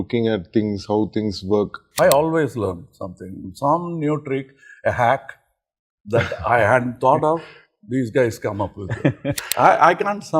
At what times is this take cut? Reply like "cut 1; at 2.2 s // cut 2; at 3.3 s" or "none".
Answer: cut 1; at 1.8 s // cut 2; at 9.3 s